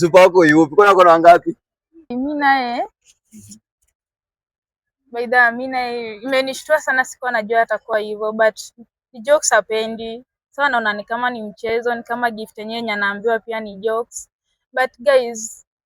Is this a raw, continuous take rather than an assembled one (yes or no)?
no